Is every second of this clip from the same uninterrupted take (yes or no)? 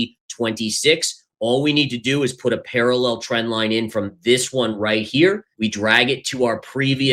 no